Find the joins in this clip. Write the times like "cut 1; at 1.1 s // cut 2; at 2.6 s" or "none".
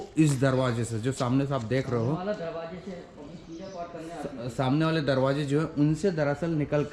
none